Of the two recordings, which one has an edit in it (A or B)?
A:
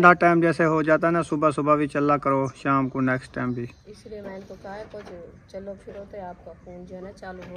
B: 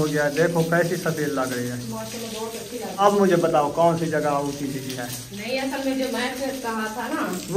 B